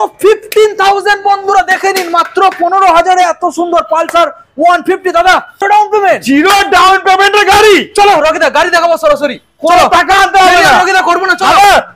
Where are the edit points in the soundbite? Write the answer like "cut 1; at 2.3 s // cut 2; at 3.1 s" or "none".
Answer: cut 1; at 5.5 s